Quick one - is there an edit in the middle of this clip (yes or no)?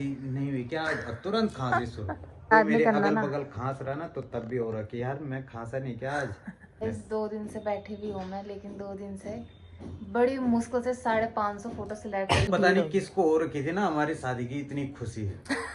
yes